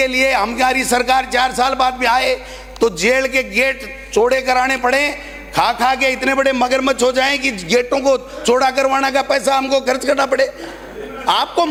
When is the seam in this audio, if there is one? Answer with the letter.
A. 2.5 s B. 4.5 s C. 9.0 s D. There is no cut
D